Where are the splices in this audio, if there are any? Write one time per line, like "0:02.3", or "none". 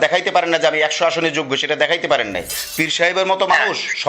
0:02.6